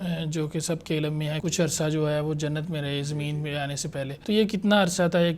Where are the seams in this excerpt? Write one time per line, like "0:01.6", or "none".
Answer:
0:01.4
0:04.2